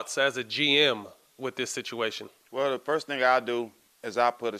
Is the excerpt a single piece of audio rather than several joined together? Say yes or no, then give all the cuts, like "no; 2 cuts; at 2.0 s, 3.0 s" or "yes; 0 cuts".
no; 1 cut; at 2.3 s